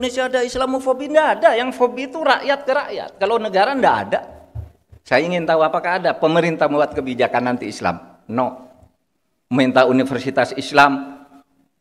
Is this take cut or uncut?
uncut